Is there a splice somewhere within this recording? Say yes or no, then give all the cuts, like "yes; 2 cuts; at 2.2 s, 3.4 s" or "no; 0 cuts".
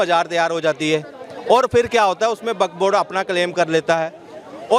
no; 0 cuts